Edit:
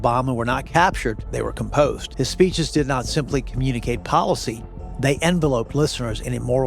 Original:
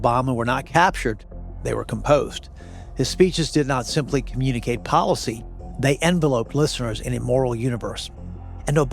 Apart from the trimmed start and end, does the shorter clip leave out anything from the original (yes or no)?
yes